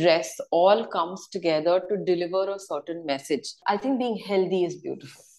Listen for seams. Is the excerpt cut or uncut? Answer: cut